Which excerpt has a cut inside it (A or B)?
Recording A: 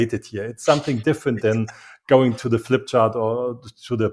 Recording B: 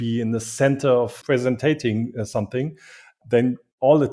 B